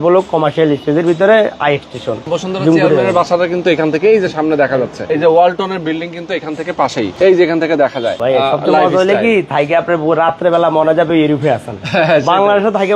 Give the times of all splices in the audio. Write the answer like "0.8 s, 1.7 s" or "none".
2.3 s, 5.0 s, 7.1 s, 8.2 s